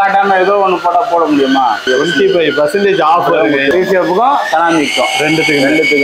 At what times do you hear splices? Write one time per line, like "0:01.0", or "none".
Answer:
0:01.8
0:03.7